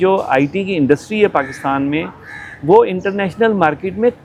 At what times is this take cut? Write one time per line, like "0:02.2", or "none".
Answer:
none

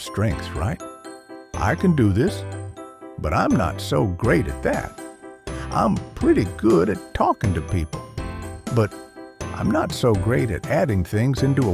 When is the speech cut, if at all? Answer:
none

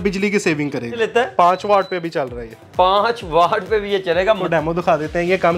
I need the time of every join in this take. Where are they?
0:01.0
0:04.4

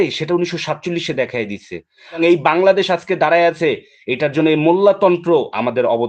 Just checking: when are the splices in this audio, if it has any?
0:02.2

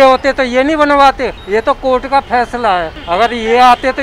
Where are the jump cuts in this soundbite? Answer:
0:01.3
0:03.0

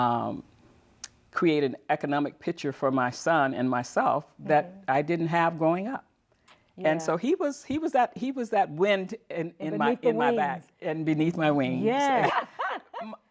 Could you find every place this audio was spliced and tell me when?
0:12.2

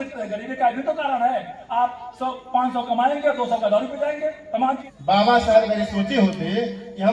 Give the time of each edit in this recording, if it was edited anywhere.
0:04.9

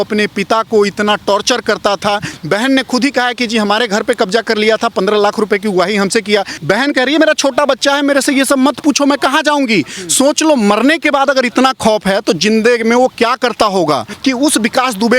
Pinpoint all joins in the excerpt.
0:02.3
0:06.5
0:14.1

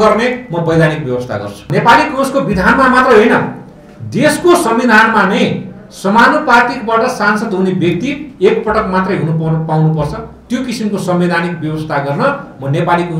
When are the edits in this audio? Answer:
0:01.7

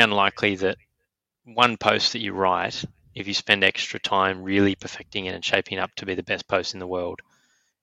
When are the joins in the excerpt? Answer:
none

